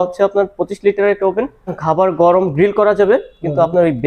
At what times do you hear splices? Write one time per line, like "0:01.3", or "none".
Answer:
0:01.8